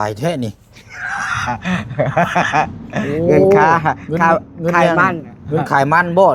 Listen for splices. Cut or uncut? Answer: uncut